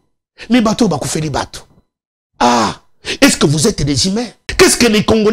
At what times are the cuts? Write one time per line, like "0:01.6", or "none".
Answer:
0:04.4